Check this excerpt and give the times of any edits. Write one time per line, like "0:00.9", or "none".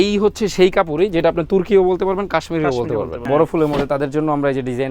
0:03.3